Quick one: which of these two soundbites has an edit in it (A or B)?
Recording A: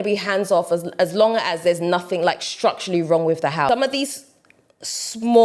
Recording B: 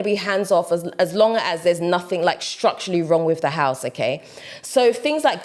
A